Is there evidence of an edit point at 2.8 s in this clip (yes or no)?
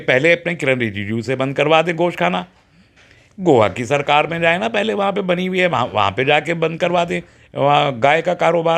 no